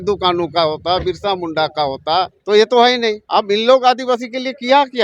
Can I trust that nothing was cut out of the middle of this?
no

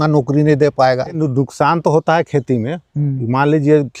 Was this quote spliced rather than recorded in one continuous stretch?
yes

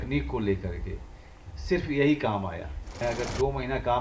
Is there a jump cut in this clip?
yes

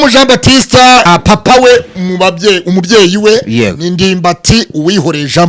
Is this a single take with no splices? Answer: no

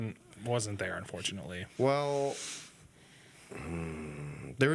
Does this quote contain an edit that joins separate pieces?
no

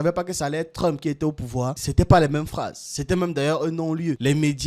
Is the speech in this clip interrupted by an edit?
no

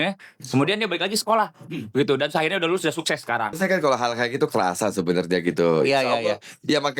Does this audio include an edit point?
yes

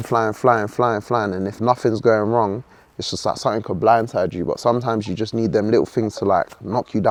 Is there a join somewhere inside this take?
no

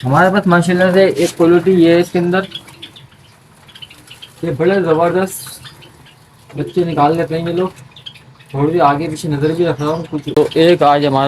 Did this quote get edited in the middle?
yes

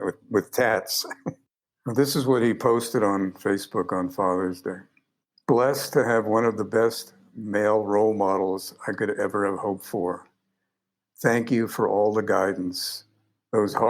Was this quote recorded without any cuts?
no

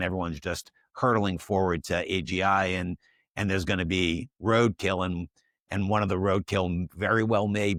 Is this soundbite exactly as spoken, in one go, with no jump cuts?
yes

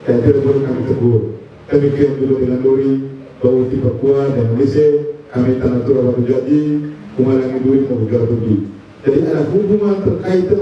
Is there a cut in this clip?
no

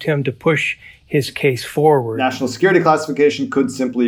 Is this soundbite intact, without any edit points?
no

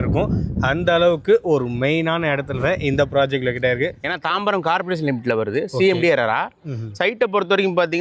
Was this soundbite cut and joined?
yes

